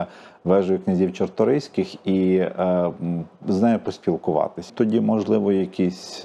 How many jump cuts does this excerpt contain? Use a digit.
1